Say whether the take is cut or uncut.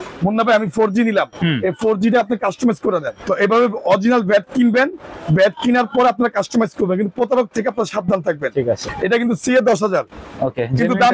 cut